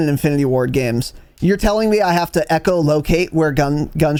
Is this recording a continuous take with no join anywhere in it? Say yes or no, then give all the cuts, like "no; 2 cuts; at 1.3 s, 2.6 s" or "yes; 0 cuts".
yes; 0 cuts